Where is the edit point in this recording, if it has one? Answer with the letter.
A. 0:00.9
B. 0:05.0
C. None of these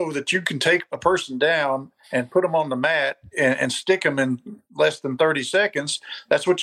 A